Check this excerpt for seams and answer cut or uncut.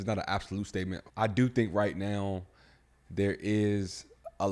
cut